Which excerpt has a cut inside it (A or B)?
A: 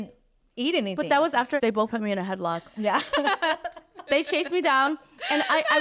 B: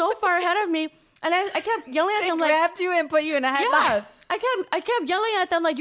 A